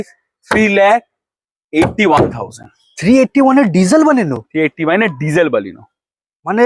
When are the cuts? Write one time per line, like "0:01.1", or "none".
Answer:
none